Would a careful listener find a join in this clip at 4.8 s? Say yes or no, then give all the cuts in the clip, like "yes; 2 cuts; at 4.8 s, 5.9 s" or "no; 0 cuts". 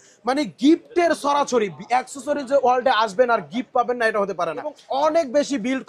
yes; 1 cut; at 4.8 s